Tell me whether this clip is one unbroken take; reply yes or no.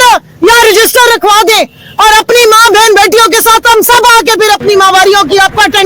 yes